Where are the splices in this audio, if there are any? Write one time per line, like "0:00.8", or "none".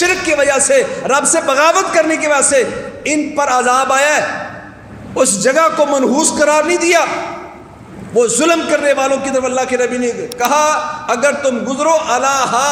none